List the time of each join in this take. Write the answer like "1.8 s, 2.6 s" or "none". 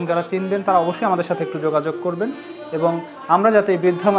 none